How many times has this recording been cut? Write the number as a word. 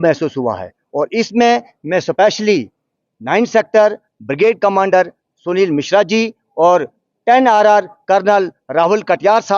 zero